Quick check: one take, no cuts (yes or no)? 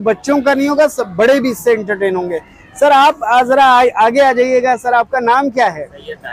yes